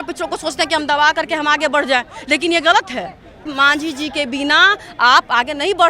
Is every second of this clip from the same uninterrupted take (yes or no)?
no